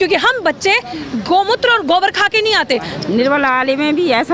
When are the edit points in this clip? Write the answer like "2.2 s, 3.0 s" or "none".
2.9 s